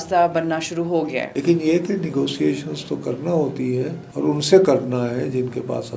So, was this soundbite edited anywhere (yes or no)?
yes